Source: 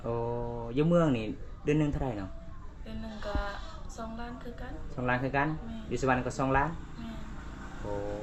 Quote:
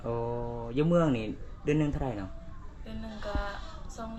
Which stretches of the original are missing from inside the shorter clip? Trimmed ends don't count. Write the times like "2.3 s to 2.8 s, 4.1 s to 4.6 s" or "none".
none